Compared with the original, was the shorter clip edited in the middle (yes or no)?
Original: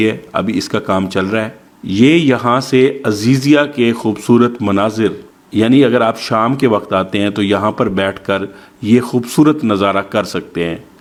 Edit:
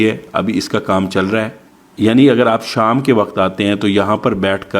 yes